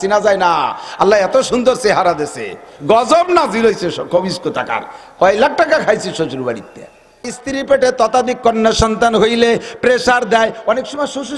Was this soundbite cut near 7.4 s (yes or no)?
yes